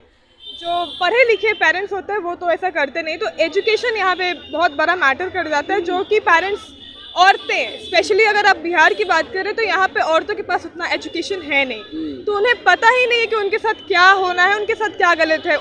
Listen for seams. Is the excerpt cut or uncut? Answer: uncut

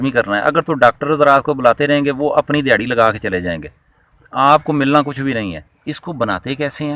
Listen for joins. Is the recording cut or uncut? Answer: cut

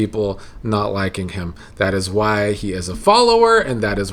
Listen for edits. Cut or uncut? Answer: uncut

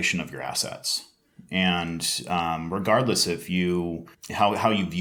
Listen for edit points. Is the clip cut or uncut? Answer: uncut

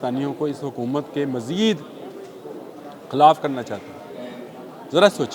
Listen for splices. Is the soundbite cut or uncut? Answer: uncut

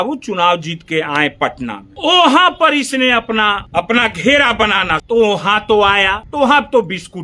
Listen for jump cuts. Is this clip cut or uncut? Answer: cut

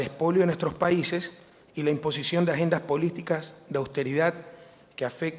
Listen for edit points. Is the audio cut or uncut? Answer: uncut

